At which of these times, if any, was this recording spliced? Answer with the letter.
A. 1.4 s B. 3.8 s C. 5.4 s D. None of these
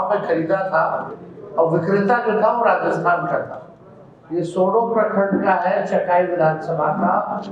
D